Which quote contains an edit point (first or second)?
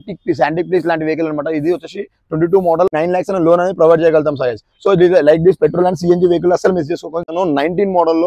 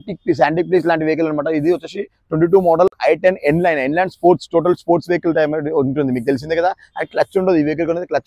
first